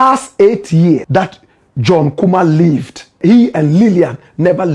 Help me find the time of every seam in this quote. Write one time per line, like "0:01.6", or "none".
0:01.0
0:03.1